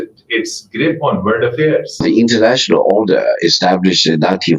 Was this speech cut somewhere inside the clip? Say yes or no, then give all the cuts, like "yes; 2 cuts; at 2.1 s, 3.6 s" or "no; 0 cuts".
yes; 1 cut; at 2.0 s